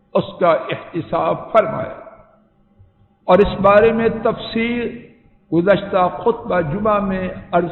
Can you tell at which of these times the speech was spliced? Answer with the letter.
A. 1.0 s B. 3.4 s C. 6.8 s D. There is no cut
D